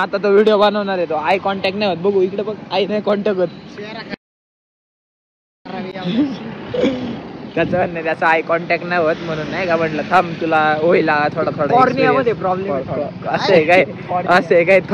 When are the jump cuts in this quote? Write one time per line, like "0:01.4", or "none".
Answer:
none